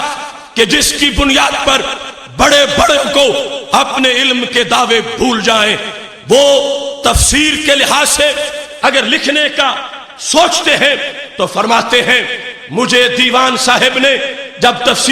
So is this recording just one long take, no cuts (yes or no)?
yes